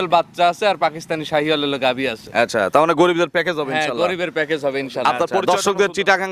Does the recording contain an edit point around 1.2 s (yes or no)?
no